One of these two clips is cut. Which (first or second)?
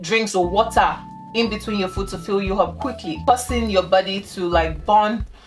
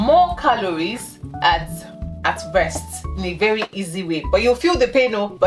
first